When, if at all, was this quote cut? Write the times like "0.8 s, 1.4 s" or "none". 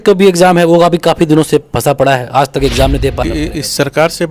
3.2 s

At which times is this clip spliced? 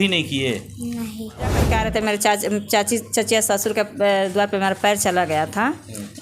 1.7 s

